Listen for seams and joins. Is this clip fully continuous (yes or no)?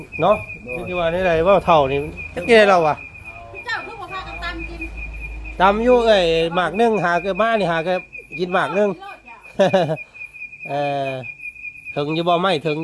yes